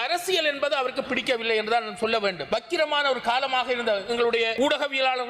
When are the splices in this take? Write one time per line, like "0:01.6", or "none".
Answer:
0:02.4
0:04.5